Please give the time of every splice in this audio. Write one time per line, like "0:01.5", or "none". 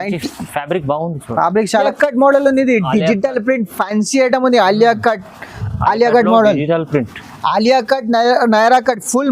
0:01.9